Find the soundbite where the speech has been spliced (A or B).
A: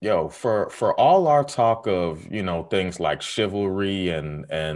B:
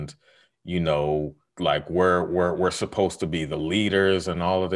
B